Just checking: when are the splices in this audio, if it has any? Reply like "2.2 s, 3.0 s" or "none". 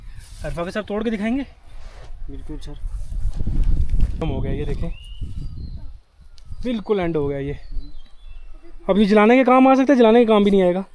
4.2 s

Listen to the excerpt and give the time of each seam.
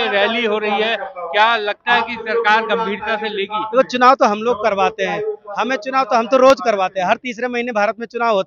none

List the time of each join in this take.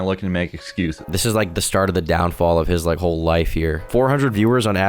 1.0 s, 3.9 s

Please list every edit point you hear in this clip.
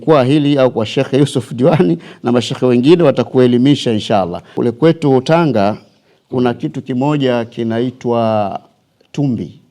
4.4 s

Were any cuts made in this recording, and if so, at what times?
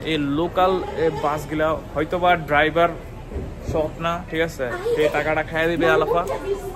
none

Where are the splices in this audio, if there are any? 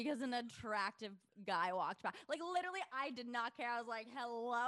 none

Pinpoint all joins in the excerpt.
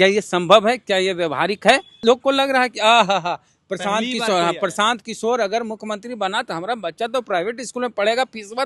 2.0 s

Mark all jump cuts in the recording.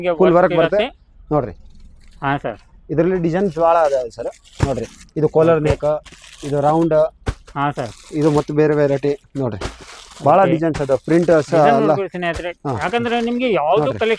none

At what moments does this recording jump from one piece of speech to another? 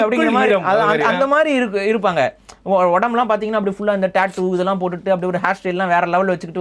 none

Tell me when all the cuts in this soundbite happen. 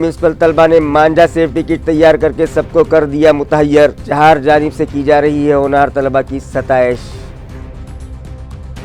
7.4 s

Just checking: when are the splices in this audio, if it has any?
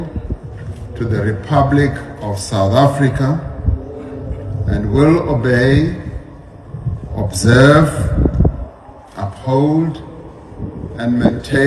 none

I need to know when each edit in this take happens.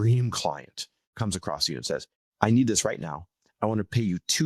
1.2 s, 2.2 s

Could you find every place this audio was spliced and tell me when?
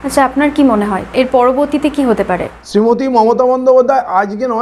1.0 s, 2.5 s

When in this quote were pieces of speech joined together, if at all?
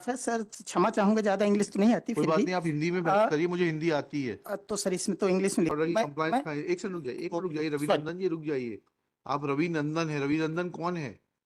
5.7 s

